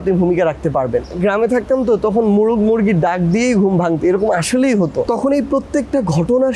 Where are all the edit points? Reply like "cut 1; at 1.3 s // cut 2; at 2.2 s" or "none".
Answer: cut 1; at 1.1 s // cut 2; at 5.1 s